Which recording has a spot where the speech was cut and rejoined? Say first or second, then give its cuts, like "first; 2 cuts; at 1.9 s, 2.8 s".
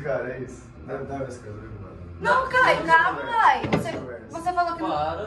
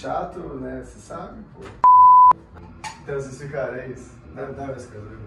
second; 1 cut; at 2.5 s